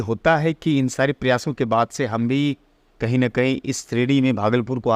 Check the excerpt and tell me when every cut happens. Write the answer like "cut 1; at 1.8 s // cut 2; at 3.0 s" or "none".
none